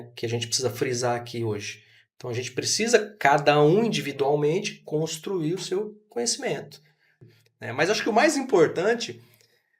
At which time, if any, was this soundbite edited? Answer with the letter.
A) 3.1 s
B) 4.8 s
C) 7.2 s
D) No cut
C